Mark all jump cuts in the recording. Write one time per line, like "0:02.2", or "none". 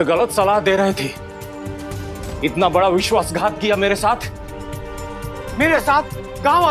0:02.2
0:05.4